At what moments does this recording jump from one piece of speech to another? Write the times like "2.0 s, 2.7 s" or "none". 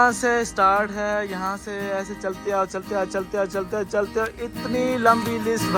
none